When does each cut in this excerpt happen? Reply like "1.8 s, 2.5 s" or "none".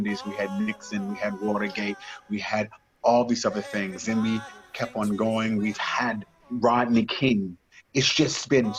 none